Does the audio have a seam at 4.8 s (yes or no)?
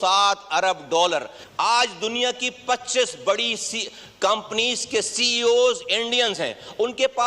no